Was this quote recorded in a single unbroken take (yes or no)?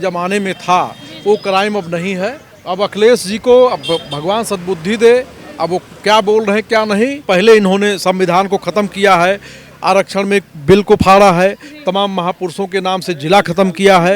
no